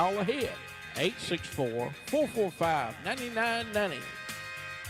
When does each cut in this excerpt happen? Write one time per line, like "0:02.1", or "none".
none